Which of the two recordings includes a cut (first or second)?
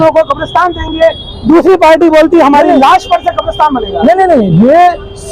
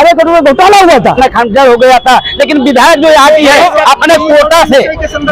second